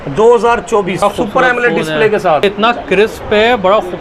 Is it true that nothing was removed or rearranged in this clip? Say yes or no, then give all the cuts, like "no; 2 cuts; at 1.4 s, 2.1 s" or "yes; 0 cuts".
no; 2 cuts; at 1.0 s, 2.4 s